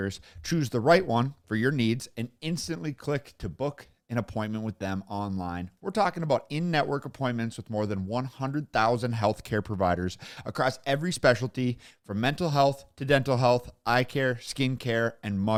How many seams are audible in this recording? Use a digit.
0